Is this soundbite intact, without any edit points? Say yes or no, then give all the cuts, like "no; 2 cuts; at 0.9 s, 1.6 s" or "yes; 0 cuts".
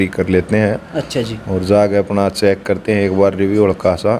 yes; 0 cuts